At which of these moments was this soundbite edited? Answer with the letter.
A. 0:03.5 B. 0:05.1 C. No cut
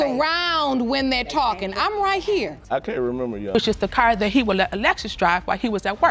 A